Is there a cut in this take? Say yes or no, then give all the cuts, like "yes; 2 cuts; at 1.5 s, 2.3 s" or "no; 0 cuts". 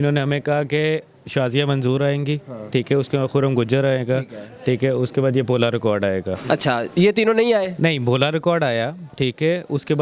no; 0 cuts